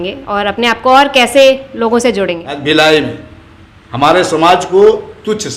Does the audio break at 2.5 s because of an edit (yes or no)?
yes